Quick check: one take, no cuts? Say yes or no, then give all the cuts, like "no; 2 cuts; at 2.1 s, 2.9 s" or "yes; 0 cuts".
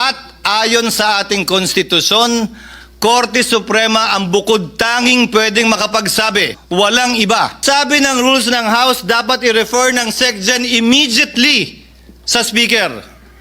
no; 2 cuts; at 6.6 s, 7.6 s